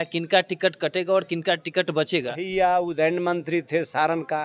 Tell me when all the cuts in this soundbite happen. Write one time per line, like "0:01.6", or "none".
0:02.4